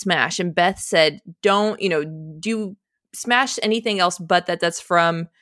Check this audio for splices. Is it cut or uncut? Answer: uncut